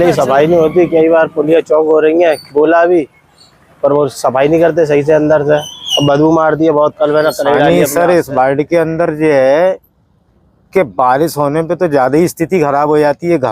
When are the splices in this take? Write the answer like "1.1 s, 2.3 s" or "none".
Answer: 7.7 s